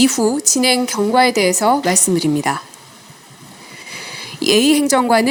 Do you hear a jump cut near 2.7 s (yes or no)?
no